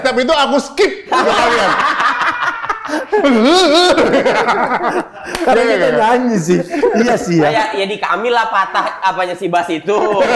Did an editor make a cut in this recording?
no; 0 cuts

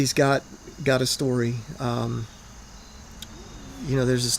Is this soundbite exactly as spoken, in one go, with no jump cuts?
yes; 0 cuts

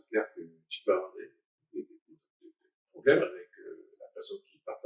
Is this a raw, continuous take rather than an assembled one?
yes; 0 cuts

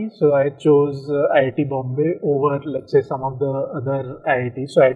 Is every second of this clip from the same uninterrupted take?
yes; 0 cuts

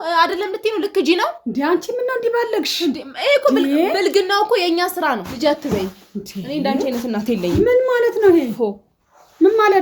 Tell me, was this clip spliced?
yes; 1 cut; at 5.3 s

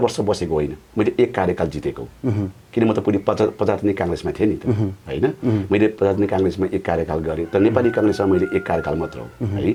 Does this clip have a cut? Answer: no; 0 cuts

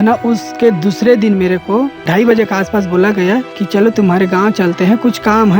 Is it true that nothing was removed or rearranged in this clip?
no; 2 cuts; at 2.1 s, 3.6 s

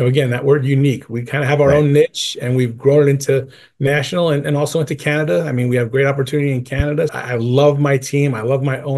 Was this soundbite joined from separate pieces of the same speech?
yes; 1 cut; at 7.1 s

